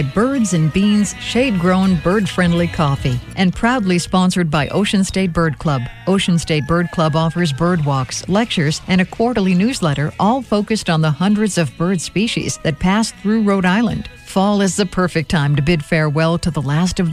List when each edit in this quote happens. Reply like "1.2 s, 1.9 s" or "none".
3.2 s